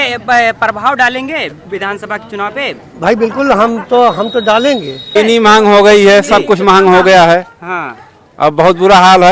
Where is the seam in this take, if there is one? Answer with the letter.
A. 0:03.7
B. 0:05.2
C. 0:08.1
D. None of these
B